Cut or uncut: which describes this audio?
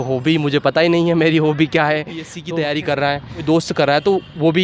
cut